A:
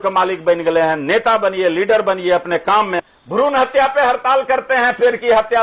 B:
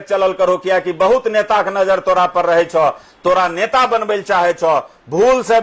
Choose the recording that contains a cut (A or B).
A